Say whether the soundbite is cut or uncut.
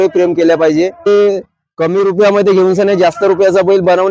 cut